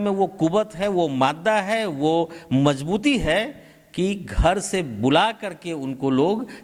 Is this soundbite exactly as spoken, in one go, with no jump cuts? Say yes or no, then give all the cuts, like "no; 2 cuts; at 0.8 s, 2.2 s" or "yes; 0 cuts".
yes; 0 cuts